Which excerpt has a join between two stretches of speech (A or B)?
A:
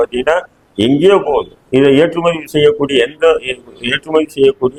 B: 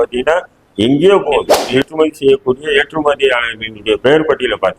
B